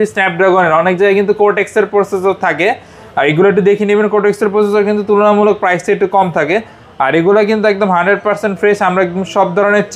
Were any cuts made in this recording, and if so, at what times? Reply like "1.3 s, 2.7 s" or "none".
none

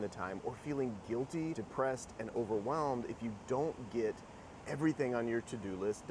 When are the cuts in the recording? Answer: 1.6 s

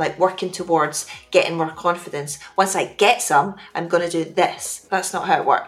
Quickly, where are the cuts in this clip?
4.7 s

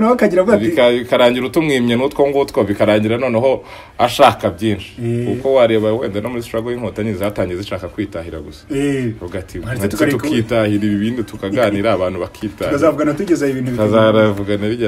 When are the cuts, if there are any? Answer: none

